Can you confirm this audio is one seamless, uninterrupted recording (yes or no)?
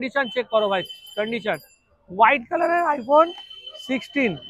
yes